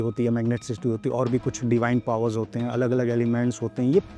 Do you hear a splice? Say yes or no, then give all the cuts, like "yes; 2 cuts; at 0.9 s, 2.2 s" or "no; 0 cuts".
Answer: no; 0 cuts